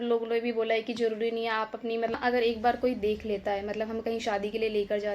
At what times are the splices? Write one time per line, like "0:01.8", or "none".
0:02.1